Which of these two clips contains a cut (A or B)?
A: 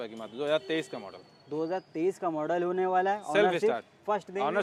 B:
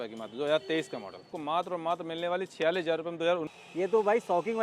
B